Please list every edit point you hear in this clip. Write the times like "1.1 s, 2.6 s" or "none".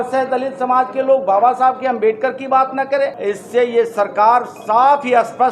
3.2 s